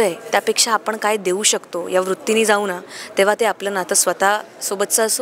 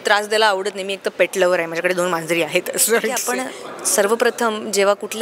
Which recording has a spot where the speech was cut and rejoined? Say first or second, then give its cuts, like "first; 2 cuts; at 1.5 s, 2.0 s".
second; 1 cut; at 3.3 s